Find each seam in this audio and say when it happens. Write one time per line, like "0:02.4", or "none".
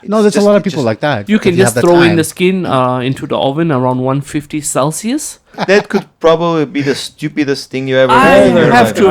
0:01.2
0:05.6